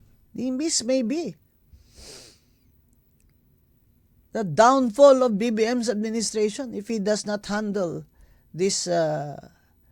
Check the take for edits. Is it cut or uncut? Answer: uncut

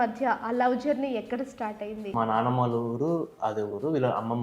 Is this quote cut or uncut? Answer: cut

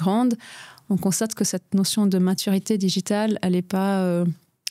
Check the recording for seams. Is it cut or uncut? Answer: uncut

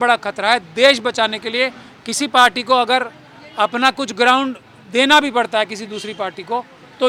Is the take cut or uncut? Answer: uncut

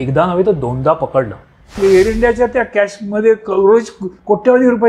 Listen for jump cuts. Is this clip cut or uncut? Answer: cut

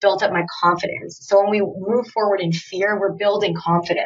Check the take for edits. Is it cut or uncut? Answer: uncut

